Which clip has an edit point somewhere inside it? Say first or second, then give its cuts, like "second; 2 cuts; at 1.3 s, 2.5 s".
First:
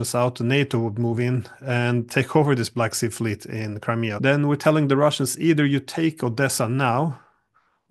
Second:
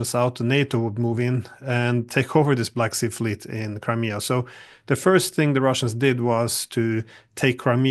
first; 1 cut; at 4.1 s